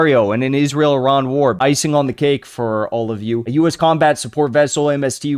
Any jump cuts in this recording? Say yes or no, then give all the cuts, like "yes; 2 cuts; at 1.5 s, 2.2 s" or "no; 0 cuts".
yes; 2 cuts; at 1.6 s, 3.7 s